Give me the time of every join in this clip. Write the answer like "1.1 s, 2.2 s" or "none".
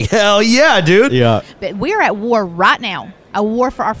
1.5 s